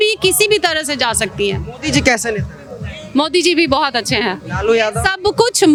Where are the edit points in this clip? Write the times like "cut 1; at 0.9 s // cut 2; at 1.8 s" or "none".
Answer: none